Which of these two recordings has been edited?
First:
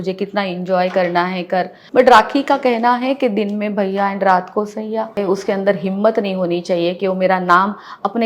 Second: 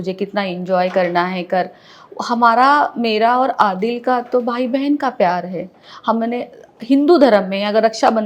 first; 2 cuts; at 1.8 s, 5.2 s

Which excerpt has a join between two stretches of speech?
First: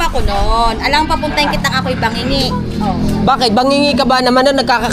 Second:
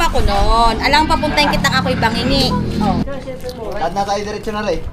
second; 1 cut; at 3.0 s

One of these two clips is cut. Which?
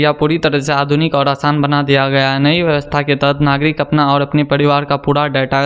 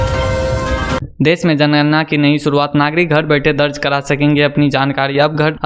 second; 1 cut; at 1.0 s

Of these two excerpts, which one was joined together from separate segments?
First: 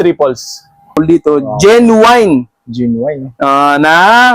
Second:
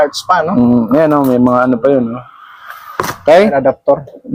first; 1 cut; at 0.9 s

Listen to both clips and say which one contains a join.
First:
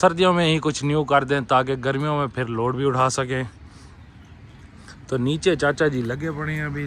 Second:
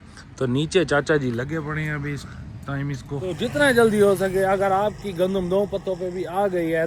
second; 1 cut; at 3.1 s

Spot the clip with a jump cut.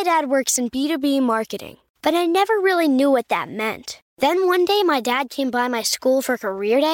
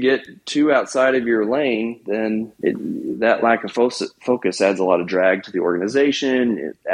second; 1 cut; at 2.5 s

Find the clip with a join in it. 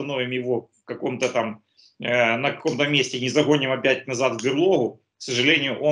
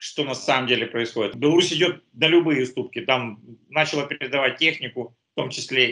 second; 1 cut; at 1.3 s

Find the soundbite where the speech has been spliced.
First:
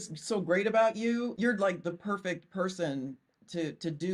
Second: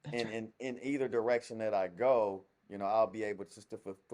first; 1 cut; at 1.3 s

